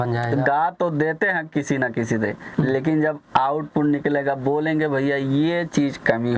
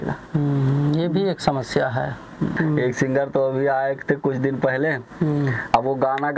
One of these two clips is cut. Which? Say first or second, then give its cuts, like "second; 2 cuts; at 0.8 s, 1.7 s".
second; 1 cut; at 2.5 s